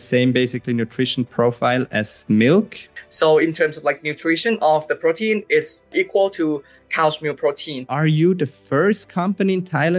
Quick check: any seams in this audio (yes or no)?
yes